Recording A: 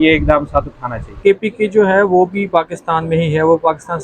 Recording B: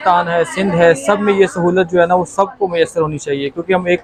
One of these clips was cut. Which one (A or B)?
A